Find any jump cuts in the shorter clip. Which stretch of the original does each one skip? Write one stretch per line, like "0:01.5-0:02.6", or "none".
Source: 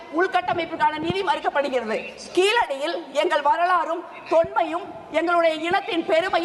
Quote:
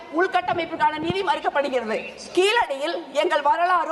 none